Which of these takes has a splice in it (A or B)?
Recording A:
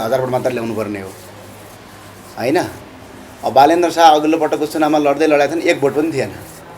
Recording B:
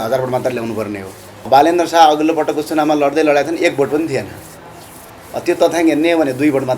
B